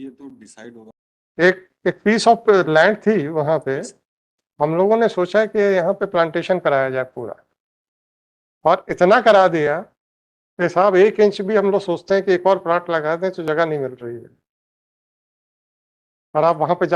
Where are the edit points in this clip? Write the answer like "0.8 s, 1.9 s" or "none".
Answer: 0.9 s